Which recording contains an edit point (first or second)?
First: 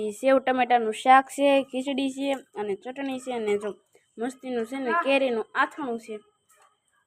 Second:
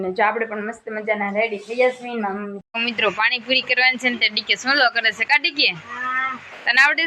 second